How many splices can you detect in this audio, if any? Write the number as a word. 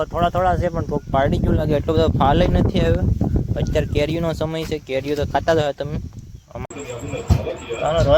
one